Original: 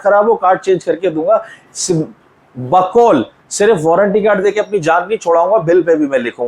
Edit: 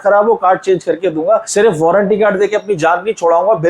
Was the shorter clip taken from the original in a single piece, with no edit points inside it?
no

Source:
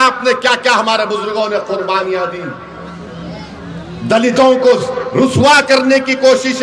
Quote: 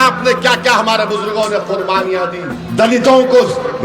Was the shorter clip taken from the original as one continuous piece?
no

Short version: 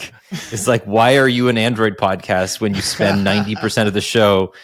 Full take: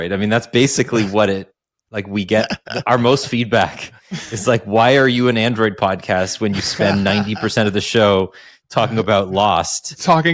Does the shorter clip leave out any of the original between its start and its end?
no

